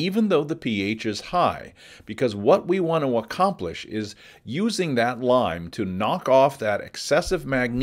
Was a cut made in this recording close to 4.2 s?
no; 1 cut; at 1.7 s

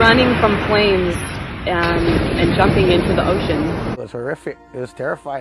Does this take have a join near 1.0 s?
no; 1 cut; at 4.0 s

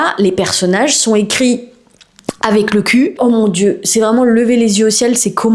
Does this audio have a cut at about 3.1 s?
yes; 1 cut; at 3.1 s

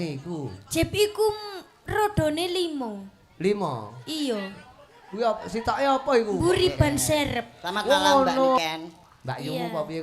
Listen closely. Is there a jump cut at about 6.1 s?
no; 1 cut; at 8.6 s

